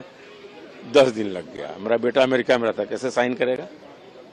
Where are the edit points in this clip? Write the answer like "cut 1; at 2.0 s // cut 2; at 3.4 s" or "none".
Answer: none